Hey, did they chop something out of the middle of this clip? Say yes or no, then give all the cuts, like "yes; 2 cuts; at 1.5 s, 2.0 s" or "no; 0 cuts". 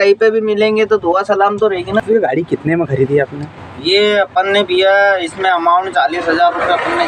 yes; 1 cut; at 2.0 s